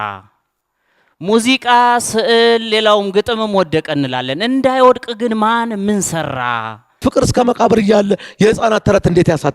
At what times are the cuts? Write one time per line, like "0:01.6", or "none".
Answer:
0:07.0